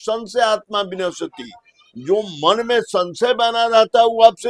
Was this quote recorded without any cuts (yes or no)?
yes